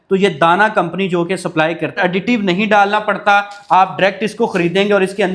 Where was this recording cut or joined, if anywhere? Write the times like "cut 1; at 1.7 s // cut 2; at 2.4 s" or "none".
cut 1; at 2.0 s